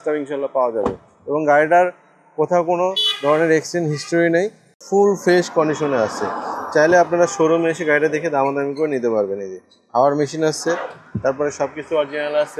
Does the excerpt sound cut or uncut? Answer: cut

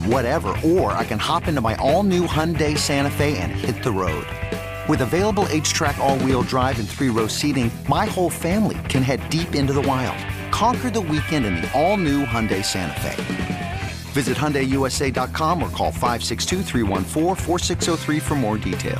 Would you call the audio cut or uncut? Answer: uncut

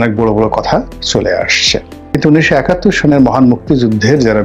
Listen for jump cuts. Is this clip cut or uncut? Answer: cut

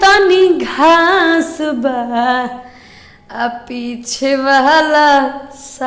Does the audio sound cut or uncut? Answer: uncut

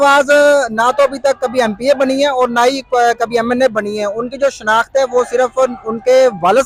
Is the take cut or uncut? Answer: uncut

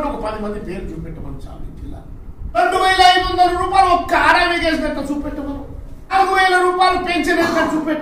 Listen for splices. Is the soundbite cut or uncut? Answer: cut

